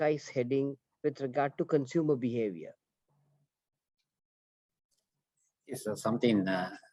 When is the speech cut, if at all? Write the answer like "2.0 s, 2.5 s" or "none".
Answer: none